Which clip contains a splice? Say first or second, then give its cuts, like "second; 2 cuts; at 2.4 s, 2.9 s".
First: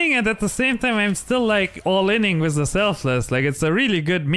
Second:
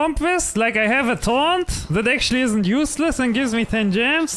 second; 1 cut; at 1.8 s